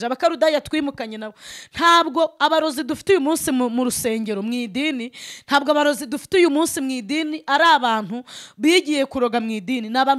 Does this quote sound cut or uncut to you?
uncut